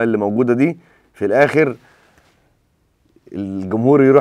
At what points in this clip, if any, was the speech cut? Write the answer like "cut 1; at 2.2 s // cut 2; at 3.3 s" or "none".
none